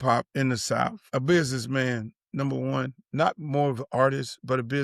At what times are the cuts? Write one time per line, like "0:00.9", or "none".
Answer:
0:01.0